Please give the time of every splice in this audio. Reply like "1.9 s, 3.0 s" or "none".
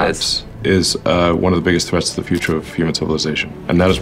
none